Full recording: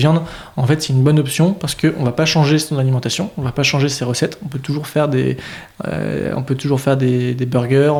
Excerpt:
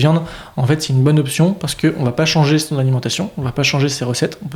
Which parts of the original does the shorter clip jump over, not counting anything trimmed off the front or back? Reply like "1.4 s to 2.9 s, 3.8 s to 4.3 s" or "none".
none

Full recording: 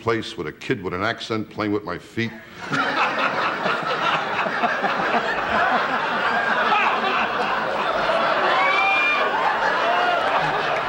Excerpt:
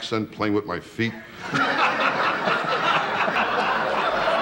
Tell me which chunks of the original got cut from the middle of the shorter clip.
4.5 s to 7.2 s

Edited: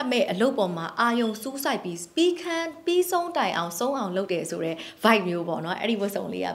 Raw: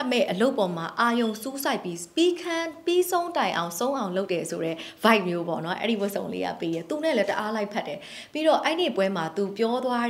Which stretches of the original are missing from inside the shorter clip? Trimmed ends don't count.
none

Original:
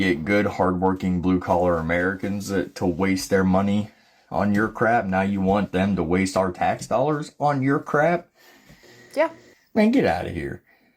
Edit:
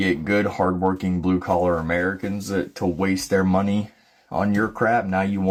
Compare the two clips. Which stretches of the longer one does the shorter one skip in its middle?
none

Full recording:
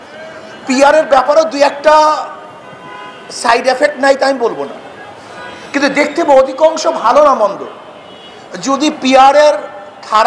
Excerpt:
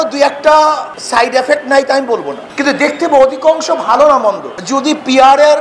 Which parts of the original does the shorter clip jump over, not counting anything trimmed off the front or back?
2.3 s to 3.3 s, 4.7 s to 5.6 s, 7.7 s to 8.5 s

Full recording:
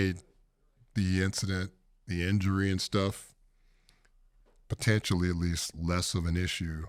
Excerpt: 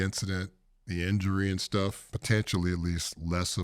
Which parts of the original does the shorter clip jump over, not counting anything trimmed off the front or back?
3.3 s to 4.7 s

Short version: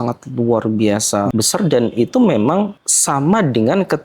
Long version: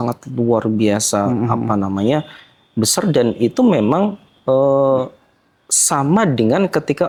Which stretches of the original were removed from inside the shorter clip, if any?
1.3 s to 2.7 s, 4.3 s to 5.7 s

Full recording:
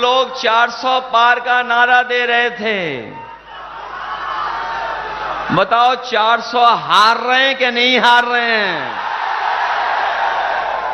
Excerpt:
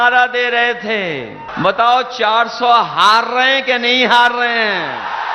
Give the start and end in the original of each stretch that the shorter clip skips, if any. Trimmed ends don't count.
3.2 s to 5.4 s

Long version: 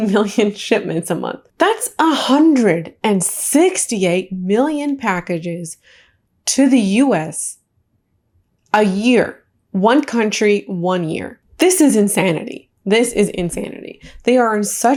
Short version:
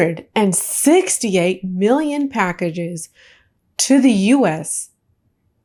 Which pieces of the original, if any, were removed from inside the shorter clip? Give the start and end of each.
none

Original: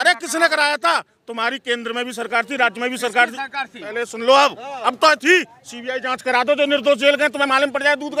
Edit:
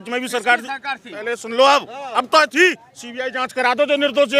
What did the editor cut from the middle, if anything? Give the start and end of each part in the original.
none

